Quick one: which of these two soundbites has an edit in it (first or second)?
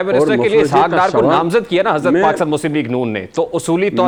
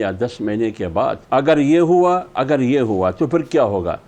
second